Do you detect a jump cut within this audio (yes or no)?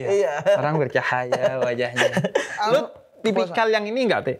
yes